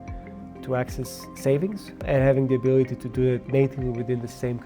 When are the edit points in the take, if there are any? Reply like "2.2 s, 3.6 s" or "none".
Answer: 2.0 s, 3.4 s